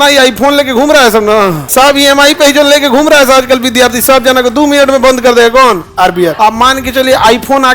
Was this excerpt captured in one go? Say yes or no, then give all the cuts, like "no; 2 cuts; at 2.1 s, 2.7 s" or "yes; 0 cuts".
no; 2 cuts; at 1.6 s, 6.3 s